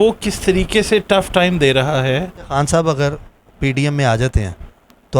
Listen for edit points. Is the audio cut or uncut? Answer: cut